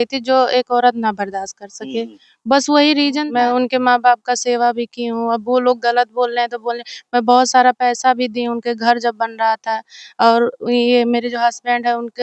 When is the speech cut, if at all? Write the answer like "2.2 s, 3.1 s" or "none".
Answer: 3.2 s